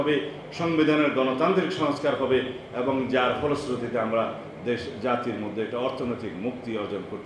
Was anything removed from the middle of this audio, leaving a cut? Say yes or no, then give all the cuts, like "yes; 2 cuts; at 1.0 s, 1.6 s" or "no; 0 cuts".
no; 0 cuts